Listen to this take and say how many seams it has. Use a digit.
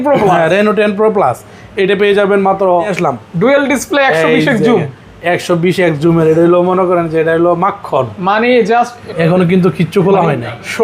2